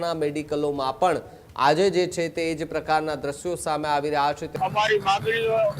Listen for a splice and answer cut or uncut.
cut